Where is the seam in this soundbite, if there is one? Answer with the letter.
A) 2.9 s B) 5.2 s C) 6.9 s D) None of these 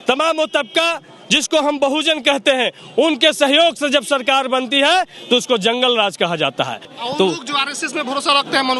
C